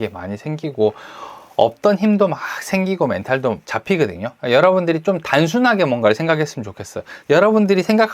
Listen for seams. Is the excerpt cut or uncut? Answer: cut